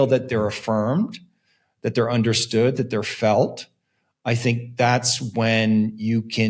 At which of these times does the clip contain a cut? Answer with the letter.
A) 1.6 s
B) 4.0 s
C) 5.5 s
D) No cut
D